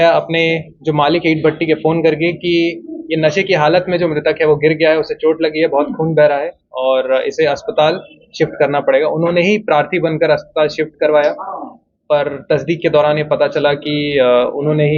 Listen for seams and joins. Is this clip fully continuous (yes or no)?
yes